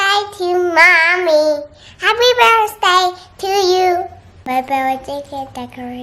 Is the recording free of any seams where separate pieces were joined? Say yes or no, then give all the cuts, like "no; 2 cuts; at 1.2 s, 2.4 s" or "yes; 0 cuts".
no; 1 cut; at 4.4 s